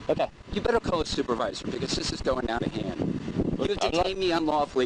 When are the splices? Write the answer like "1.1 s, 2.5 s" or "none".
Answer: none